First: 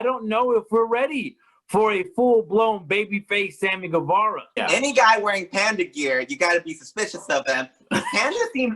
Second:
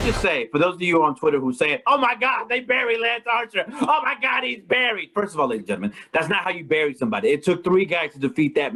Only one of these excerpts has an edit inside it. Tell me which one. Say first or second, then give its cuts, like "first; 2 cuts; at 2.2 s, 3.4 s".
first; 1 cut; at 4.6 s